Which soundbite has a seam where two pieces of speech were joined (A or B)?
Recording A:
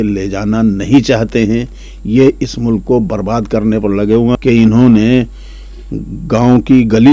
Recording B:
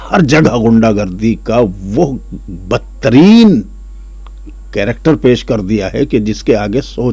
A